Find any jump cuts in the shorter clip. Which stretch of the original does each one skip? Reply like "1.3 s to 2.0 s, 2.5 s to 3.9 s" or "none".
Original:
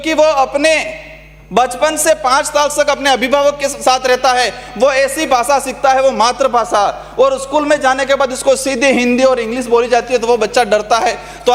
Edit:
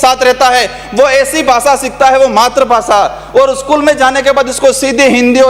none